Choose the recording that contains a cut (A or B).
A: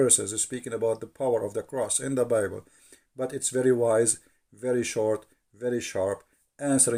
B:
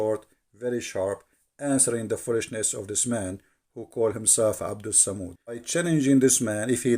B